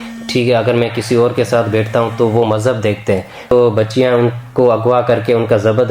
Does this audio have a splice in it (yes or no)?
yes